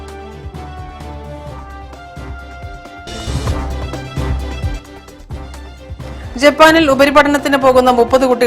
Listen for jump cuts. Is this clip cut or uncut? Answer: cut